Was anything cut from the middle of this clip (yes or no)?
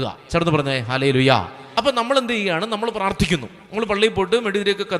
yes